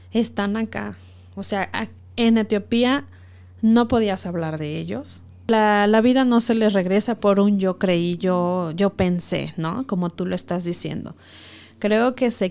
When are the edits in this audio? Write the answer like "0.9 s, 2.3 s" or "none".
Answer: 5.4 s